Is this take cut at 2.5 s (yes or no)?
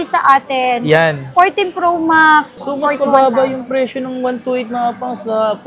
yes